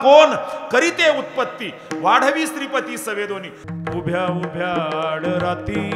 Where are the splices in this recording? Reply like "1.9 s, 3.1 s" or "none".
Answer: 3.6 s